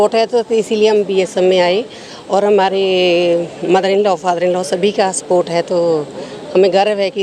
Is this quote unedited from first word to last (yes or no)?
yes